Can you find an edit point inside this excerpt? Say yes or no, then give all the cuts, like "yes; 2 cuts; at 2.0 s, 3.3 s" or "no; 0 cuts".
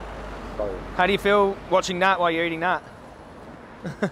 no; 0 cuts